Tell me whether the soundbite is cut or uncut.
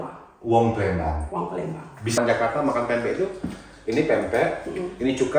cut